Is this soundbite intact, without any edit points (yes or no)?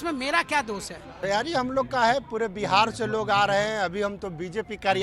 no